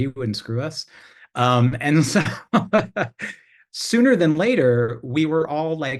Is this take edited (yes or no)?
no